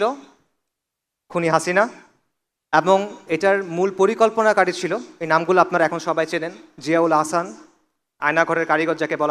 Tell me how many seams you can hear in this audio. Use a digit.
0